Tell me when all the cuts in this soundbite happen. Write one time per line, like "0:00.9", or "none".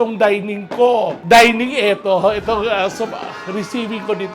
none